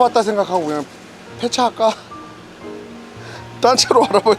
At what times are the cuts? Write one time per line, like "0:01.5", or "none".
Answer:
none